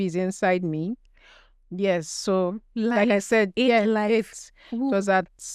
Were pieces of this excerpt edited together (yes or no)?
no